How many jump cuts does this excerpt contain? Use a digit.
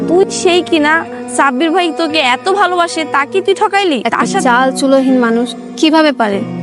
1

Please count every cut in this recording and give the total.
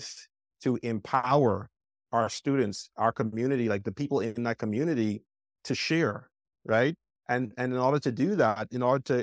0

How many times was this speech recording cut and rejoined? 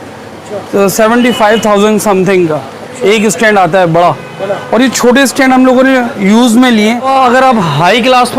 1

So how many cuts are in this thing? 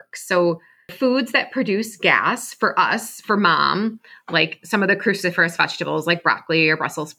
1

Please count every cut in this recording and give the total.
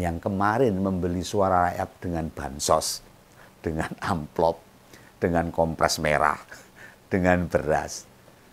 0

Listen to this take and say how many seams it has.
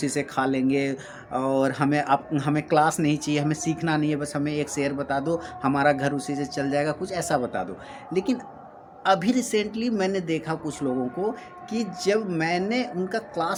0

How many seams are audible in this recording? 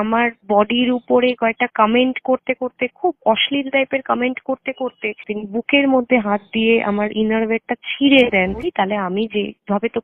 1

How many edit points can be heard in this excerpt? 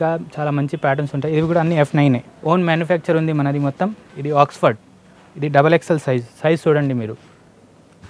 2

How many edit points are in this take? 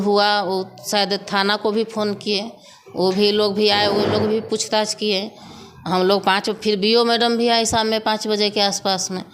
0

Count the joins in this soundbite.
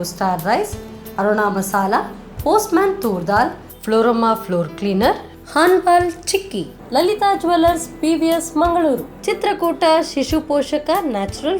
0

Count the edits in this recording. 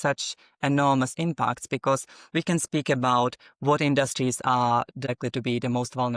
1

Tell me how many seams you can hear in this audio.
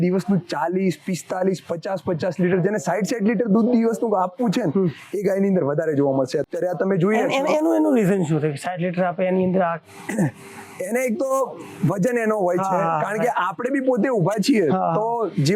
0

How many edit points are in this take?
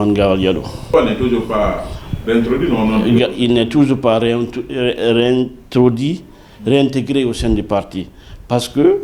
1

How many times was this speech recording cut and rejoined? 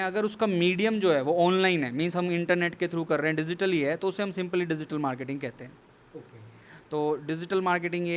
0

